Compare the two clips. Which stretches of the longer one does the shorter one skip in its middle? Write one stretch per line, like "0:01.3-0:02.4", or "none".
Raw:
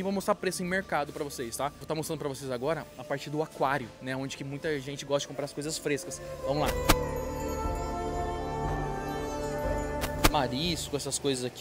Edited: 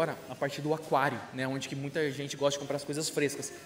none